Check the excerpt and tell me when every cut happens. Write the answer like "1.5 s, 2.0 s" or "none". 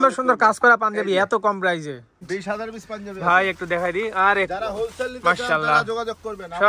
2.2 s